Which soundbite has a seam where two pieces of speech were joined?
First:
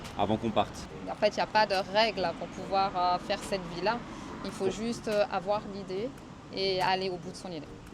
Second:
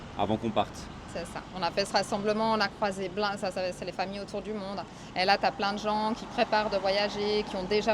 first; 1 cut; at 1.0 s

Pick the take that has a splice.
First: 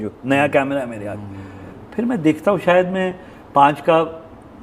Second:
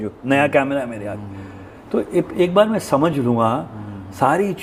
first; 1 cut; at 1.8 s

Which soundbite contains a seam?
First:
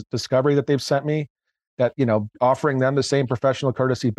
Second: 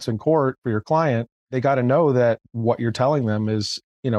first; 1 cut; at 2.3 s

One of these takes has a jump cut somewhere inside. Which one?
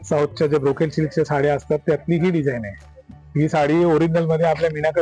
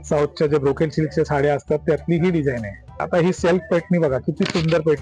second; 1 cut; at 3.0 s

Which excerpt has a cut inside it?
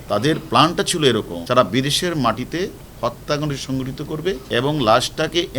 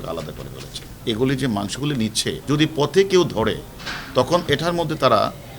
second; 2 cuts; at 0.9 s, 2.4 s

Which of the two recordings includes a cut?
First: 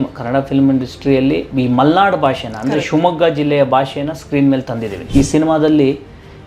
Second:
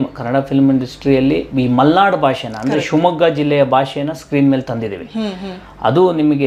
first; 1 cut; at 4.9 s

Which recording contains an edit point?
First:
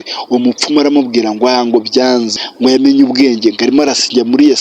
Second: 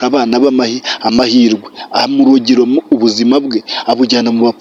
first; 1 cut; at 2.4 s

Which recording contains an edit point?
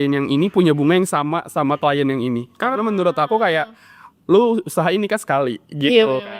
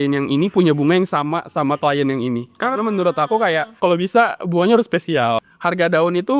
second; 2 cuts; at 3.7 s, 5.5 s

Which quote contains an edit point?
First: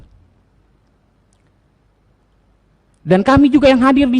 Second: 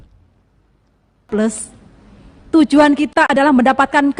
second; 1 cut; at 1.3 s

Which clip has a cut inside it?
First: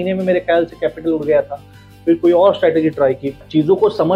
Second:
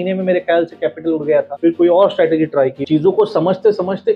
second; 2 cuts; at 1.5 s, 2.8 s

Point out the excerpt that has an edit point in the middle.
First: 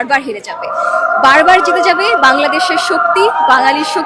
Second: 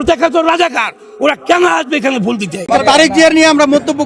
second; 1 cut; at 2.5 s

